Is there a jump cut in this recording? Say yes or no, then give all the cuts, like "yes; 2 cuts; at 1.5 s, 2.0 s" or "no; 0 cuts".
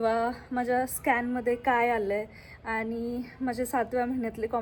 no; 0 cuts